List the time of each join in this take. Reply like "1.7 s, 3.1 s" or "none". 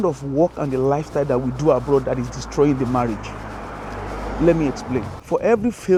none